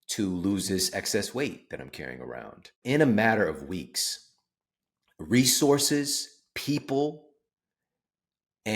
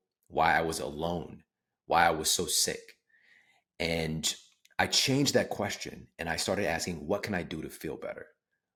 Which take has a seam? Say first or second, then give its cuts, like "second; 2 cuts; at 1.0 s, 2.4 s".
first; 1 cut; at 2.8 s